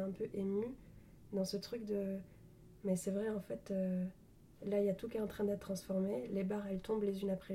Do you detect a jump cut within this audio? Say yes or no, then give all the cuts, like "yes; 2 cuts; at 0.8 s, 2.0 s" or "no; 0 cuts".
no; 0 cuts